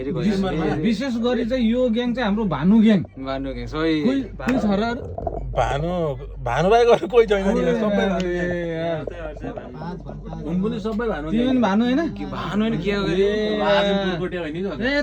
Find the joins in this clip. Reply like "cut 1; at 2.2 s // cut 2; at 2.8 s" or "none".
none